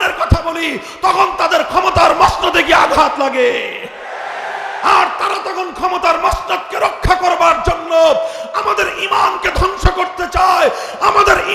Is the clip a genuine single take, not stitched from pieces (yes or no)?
yes